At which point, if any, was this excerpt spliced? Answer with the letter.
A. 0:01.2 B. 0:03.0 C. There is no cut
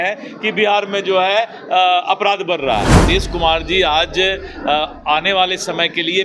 B